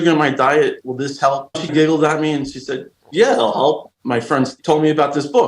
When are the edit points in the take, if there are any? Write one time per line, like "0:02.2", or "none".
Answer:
0:01.5
0:04.4